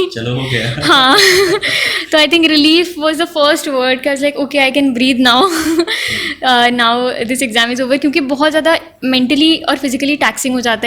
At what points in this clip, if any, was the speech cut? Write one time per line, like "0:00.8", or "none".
none